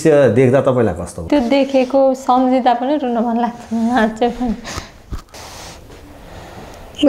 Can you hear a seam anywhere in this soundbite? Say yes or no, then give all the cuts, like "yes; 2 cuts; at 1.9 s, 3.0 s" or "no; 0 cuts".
yes; 2 cuts; at 1.2 s, 5.3 s